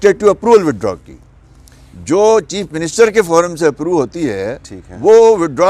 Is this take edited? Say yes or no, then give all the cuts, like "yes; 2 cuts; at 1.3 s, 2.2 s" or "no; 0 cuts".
no; 0 cuts